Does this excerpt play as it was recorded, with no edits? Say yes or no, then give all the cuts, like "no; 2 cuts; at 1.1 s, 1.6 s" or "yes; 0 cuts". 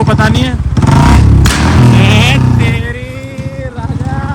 yes; 0 cuts